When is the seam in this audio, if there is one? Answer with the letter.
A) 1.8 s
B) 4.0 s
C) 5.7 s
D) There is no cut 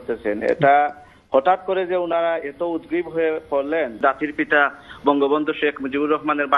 B